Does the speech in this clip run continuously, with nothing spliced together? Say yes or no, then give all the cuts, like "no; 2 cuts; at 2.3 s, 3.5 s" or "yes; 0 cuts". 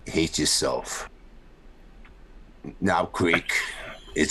no; 1 cut; at 1.1 s